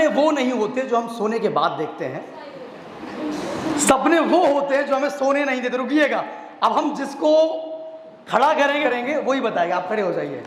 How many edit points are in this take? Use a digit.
1